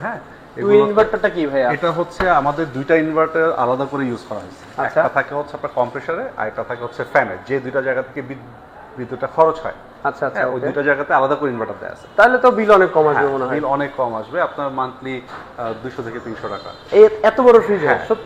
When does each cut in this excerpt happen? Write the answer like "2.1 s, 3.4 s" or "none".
none